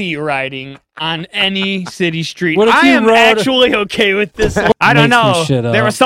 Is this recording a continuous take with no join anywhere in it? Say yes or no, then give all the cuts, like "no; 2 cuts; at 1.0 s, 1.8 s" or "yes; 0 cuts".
no; 1 cut; at 4.7 s